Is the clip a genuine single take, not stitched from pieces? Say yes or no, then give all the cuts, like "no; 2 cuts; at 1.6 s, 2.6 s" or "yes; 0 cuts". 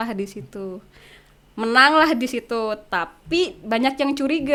yes; 0 cuts